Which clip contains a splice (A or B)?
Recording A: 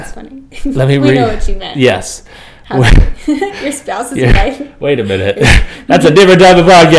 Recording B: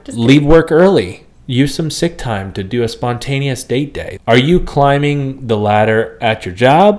B